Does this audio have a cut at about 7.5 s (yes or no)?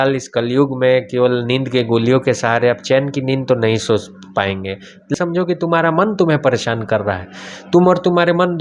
no